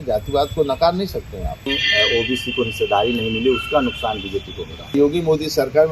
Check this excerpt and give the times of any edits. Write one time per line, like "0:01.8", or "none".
0:01.7
0:04.9